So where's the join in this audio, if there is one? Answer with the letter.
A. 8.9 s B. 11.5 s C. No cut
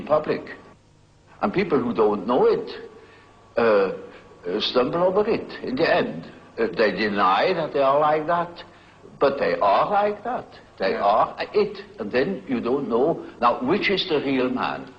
C